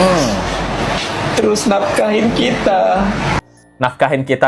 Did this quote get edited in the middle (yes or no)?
yes